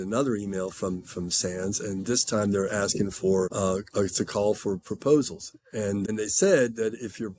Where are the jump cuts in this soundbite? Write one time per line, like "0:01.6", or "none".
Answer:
0:03.5
0:06.0